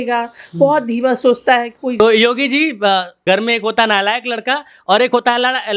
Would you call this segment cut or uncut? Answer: cut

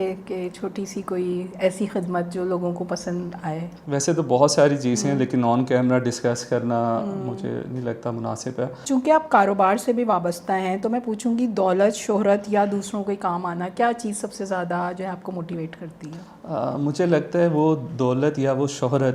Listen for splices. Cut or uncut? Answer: cut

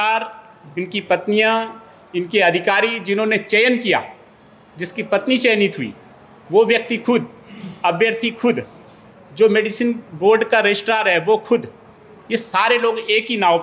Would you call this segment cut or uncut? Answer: uncut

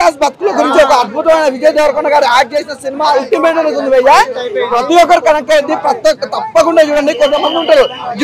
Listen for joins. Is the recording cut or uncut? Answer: uncut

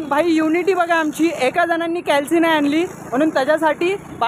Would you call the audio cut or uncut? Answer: uncut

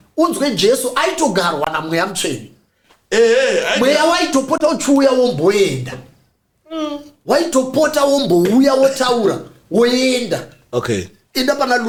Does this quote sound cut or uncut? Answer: uncut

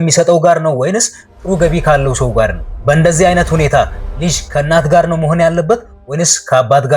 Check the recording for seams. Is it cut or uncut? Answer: uncut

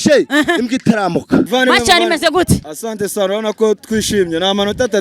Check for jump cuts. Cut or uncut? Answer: cut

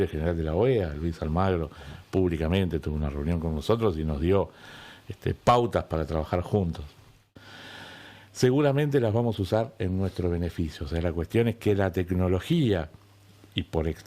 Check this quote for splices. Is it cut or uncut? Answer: cut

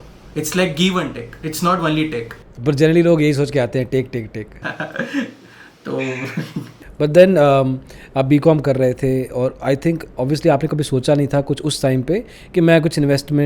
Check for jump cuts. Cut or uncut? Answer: uncut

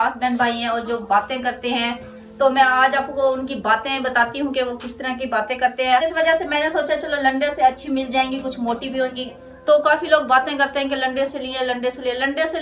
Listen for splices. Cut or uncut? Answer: cut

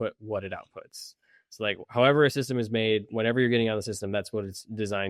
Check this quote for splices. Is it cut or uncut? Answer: uncut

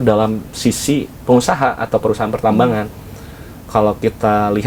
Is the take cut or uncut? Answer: uncut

